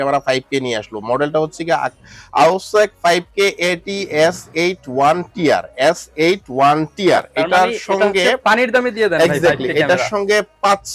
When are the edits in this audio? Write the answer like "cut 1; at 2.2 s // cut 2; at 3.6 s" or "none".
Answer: none